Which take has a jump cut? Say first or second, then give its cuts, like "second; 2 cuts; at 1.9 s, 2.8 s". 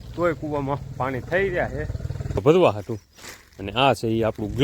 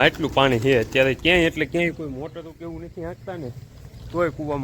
first; 1 cut; at 2.4 s